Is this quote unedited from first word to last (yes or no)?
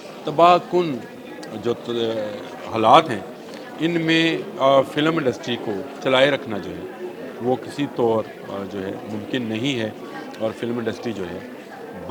yes